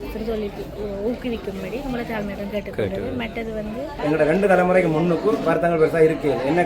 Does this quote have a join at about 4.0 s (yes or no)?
yes